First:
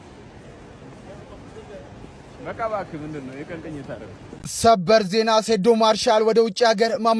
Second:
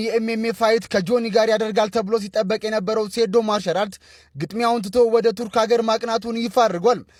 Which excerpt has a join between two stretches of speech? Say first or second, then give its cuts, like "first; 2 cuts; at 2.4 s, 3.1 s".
first; 1 cut; at 4.5 s